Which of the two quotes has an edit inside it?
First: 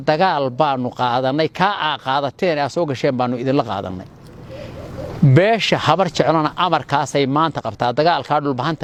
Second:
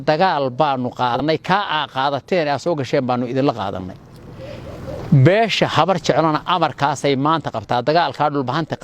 second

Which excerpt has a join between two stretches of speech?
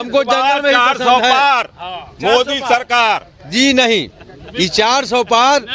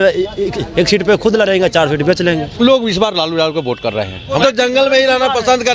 second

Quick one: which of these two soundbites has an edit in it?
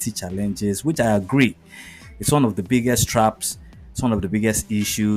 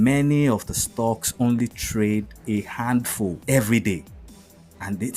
second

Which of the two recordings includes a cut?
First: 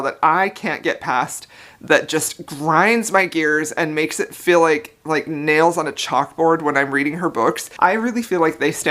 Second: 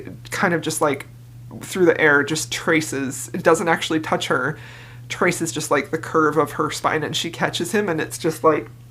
first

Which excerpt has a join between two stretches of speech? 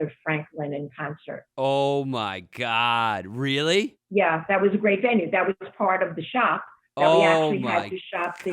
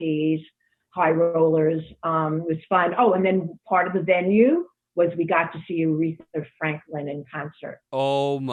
first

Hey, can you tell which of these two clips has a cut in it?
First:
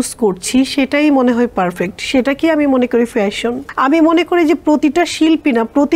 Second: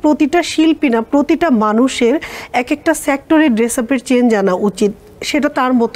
first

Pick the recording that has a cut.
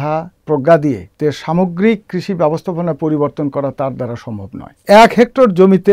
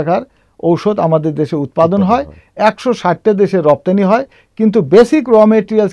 first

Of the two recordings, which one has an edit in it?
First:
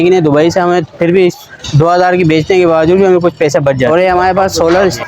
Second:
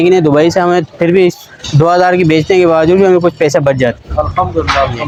first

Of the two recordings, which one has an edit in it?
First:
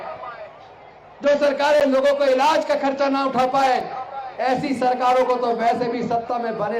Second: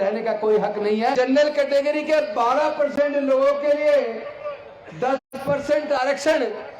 second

